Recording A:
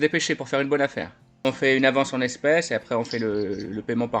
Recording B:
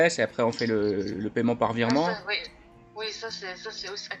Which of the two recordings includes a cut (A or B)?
A